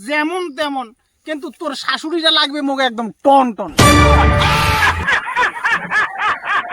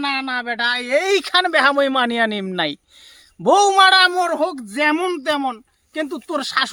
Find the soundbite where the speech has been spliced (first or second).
first